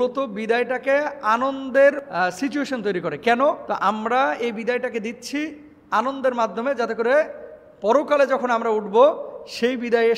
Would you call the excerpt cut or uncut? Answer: cut